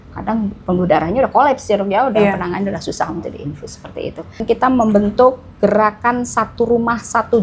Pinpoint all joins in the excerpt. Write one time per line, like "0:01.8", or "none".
0:04.4